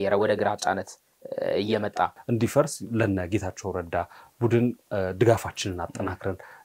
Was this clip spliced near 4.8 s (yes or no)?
no